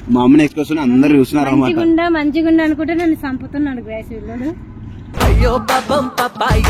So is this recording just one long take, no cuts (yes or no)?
yes